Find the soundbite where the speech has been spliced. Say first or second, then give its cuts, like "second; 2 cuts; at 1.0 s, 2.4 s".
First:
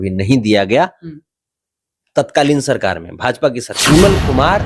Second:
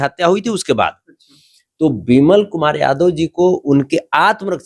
first; 1 cut; at 3.7 s